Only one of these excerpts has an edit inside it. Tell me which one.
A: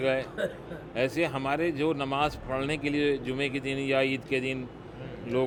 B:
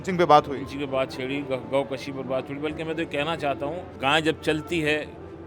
B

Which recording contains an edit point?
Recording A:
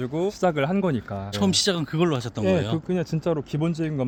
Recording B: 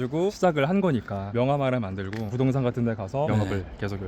B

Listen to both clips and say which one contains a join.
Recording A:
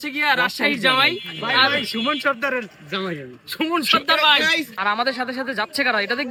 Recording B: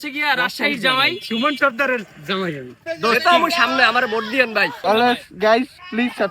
B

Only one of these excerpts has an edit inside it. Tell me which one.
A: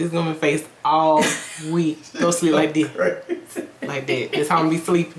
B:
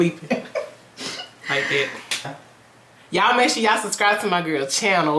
B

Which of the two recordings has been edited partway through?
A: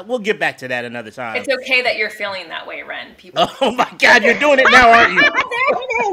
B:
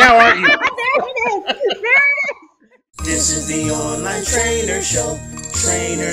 B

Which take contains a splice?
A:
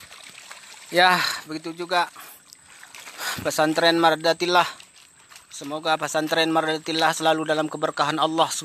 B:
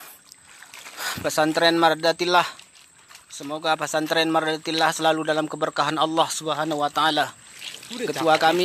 B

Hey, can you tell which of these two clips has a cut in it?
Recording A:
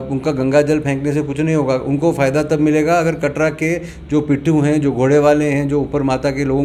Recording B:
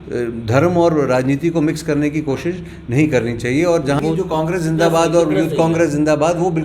B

